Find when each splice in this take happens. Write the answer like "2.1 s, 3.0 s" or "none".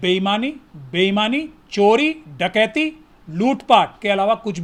none